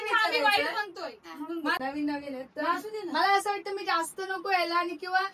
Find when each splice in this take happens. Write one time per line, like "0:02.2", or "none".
0:01.8